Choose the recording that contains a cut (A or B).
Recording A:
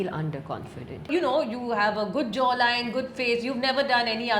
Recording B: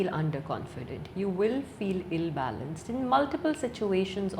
A